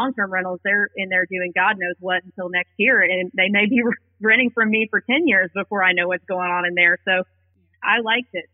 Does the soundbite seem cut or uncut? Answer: cut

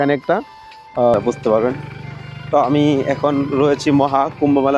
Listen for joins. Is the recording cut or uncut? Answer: cut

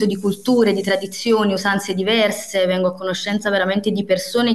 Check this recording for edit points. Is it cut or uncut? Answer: uncut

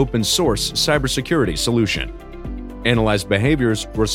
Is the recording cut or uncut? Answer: uncut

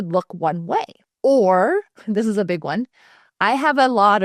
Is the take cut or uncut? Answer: cut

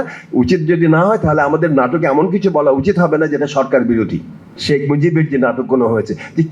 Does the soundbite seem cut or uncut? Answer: cut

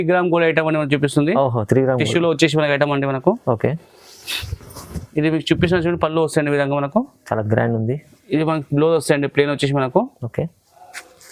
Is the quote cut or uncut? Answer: uncut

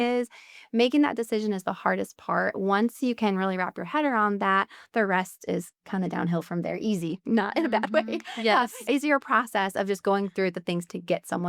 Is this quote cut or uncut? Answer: cut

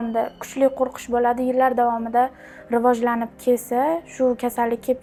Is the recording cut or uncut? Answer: uncut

